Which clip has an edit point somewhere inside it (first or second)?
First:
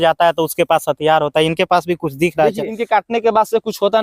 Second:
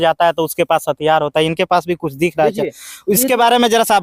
first